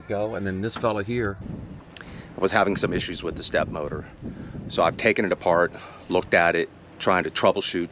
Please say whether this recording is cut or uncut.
cut